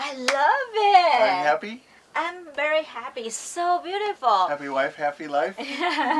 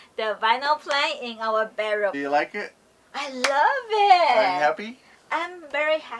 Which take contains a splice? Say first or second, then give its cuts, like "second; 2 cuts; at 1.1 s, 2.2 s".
second; 1 cut; at 2.2 s